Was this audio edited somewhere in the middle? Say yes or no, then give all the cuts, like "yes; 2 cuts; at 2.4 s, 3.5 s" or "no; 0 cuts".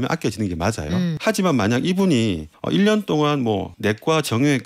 yes; 3 cuts; at 1.2 s, 2.5 s, 3.7 s